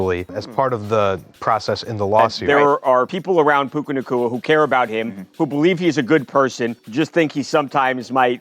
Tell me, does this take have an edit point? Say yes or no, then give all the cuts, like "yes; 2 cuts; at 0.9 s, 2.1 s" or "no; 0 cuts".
yes; 1 cut; at 2.4 s